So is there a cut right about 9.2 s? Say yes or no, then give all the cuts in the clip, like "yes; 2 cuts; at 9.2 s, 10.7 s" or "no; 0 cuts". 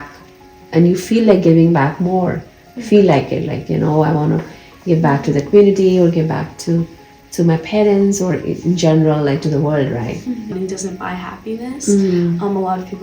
no; 1 cut; at 10.5 s